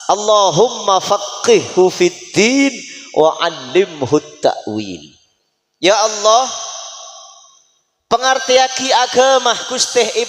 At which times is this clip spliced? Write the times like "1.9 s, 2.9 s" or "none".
none

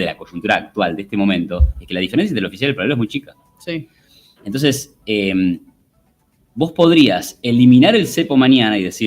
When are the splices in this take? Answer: none

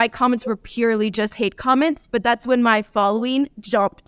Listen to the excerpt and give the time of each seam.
none

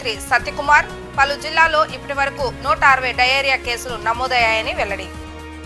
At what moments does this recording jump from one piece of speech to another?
none

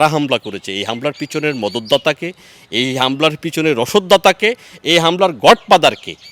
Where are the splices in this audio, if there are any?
none

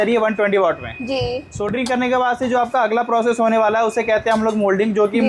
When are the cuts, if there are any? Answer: none

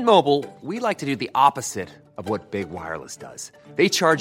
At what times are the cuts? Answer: none

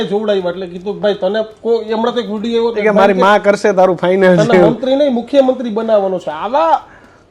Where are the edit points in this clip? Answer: none

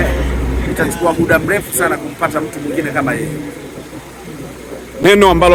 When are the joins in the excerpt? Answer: none

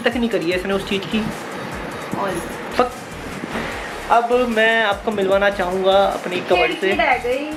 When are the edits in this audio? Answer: none

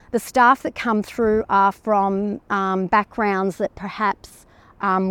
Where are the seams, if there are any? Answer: none

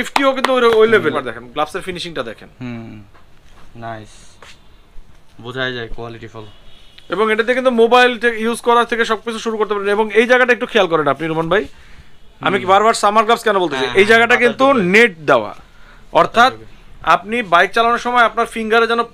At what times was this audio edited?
1.1 s

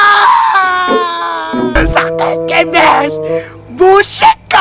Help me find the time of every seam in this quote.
1.8 s

